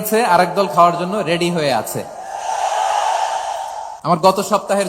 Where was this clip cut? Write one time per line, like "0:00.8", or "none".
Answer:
0:03.9